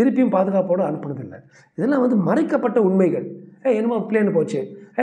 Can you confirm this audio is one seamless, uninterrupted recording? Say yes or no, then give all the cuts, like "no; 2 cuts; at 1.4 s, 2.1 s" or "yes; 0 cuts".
yes; 0 cuts